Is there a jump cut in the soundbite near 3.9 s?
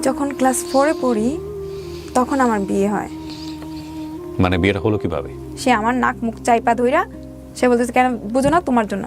no; 1 cut; at 5.3 s

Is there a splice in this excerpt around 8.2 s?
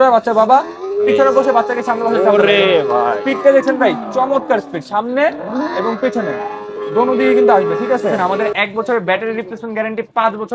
yes; 1 cut; at 8.2 s

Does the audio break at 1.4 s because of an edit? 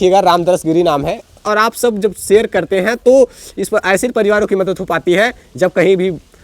yes; 1 cut; at 1.4 s

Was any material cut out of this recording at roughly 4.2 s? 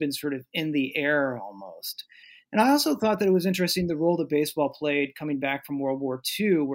no; 0 cuts

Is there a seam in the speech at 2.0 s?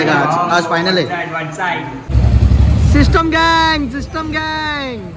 yes; 1 cut; at 2.0 s

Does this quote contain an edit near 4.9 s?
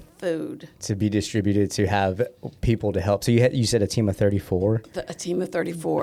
no; 0 cuts

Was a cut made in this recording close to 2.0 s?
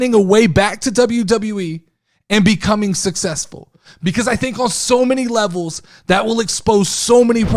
no; 0 cuts

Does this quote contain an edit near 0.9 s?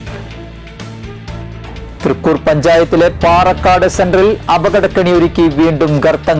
yes; 1 cut; at 0.9 s

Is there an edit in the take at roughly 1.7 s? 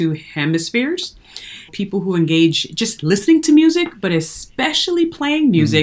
yes; 1 cut; at 1.7 s

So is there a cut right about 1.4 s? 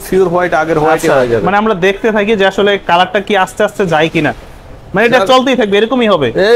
no; 0 cuts

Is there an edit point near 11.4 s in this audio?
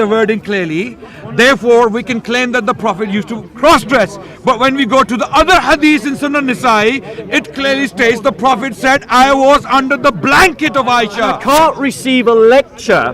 yes; 1 cut; at 11.4 s

